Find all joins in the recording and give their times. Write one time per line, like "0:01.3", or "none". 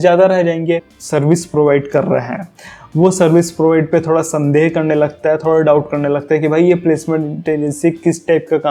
0:00.9